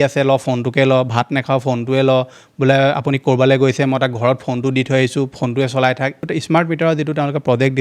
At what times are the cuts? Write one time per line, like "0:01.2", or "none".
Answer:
0:06.2

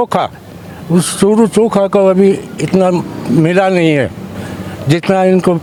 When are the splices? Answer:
none

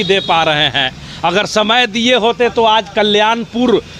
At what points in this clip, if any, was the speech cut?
none

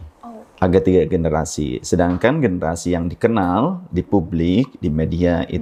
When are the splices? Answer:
none

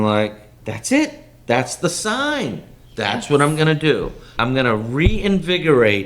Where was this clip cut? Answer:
0:04.3

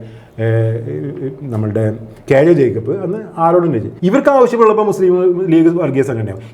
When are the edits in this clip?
0:03.9

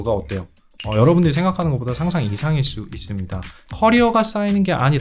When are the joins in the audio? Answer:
0:03.5

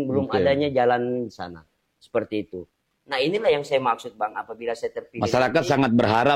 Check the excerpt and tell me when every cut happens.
none

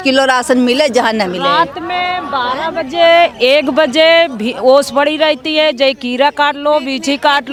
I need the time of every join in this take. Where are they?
none

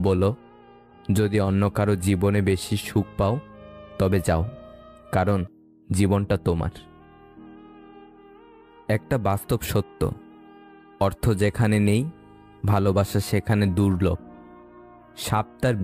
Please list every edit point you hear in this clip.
none

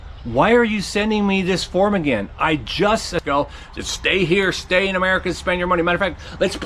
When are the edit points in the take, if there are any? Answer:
0:03.2

